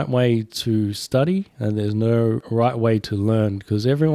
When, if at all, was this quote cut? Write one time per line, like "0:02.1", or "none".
0:02.5